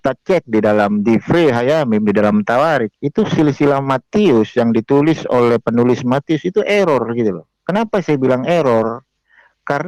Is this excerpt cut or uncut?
uncut